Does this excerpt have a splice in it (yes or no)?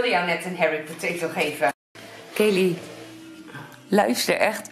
yes